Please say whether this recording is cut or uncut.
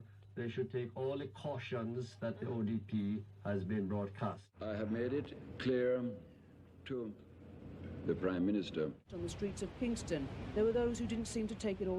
cut